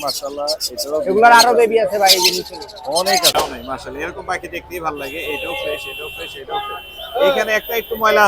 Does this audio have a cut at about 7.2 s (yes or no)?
no